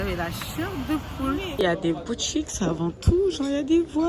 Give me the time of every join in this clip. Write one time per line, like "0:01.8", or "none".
0:01.6